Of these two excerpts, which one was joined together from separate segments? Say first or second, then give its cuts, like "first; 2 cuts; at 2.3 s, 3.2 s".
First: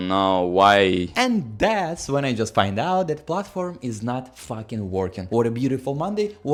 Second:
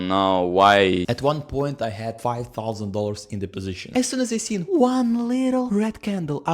second; 2 cuts; at 1.1 s, 3.9 s